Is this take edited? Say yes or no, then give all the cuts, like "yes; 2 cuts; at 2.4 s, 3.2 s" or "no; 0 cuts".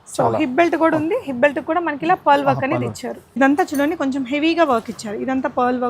yes; 1 cut; at 3.2 s